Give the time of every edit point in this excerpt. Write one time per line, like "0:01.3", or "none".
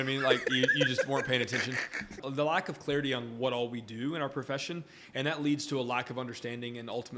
0:02.2